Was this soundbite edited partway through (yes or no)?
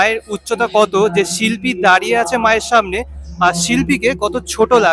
no